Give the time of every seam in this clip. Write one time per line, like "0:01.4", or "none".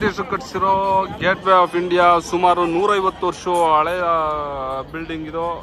none